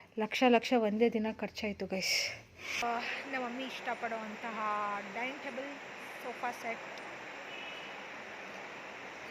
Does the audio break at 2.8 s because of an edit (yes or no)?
yes